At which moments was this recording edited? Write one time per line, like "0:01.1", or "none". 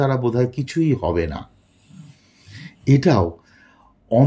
none